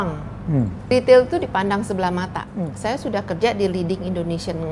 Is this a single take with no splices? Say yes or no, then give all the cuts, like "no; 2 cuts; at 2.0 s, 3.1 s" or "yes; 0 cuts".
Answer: no; 2 cuts; at 0.9 s, 2.4 s